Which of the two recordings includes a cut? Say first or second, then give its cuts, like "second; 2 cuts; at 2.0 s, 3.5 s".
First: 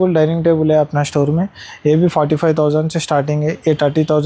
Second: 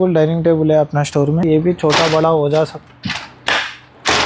second; 1 cut; at 1.4 s